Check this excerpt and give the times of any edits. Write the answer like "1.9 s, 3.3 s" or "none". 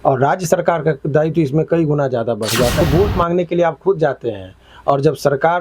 2.8 s